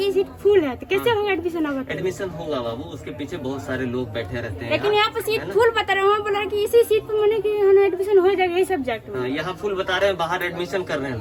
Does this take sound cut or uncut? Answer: uncut